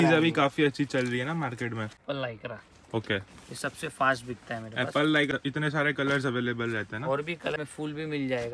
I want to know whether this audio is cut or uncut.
cut